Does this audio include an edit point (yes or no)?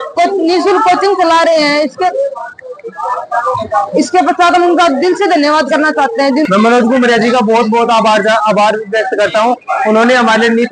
yes